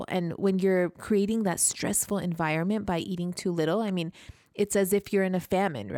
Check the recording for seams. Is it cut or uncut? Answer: uncut